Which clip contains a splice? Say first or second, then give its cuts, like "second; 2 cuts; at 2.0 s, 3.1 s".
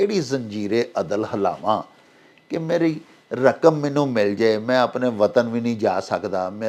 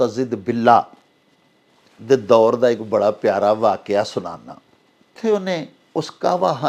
second; 1 cut; at 5.2 s